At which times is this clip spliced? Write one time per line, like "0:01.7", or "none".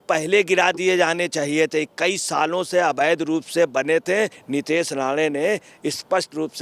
0:04.4